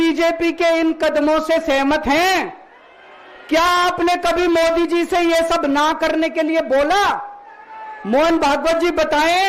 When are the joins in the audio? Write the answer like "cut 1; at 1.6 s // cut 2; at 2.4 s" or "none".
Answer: none